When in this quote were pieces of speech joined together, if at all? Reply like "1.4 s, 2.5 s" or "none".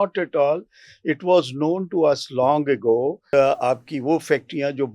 3.3 s